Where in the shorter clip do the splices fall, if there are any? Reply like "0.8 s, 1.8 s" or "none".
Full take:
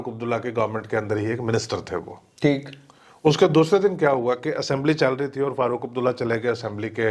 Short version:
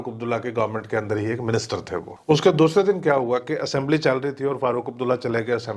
2.1 s